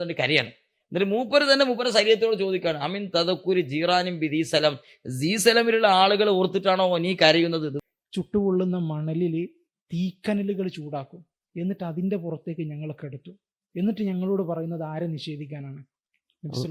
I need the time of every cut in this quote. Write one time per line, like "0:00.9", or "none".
0:07.8